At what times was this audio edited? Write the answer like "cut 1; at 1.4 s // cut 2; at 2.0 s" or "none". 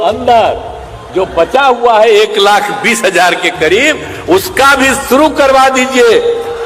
none